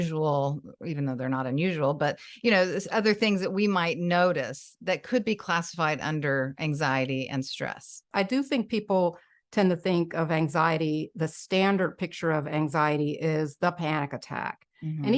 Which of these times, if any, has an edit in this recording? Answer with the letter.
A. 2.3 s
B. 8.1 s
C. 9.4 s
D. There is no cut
B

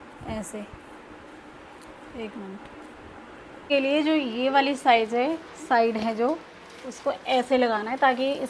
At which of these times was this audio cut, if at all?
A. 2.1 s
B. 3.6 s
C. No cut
B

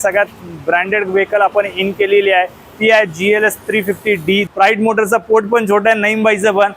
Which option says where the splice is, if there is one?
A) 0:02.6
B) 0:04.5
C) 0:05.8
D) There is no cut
B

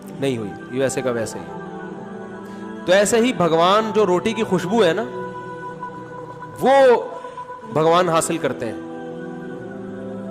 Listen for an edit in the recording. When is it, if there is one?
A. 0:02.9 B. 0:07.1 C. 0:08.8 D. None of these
C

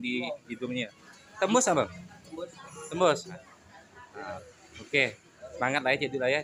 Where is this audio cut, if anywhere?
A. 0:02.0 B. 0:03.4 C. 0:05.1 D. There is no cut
B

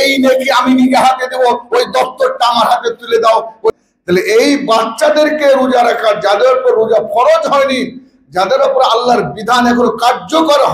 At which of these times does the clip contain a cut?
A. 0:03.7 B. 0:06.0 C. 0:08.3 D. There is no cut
A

